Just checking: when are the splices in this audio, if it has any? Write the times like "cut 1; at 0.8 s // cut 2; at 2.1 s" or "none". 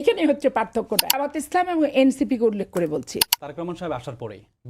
cut 1; at 1.4 s // cut 2; at 3.2 s